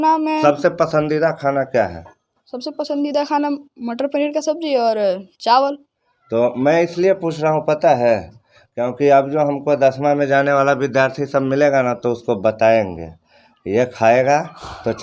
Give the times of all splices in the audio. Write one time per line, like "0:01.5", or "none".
none